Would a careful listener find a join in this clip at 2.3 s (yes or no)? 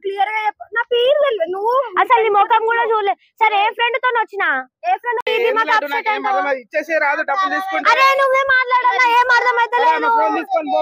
no